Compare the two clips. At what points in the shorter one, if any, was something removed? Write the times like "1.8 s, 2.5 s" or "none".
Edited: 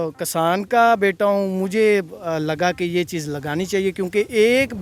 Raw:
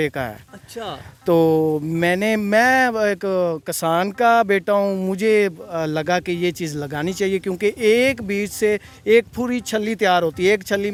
none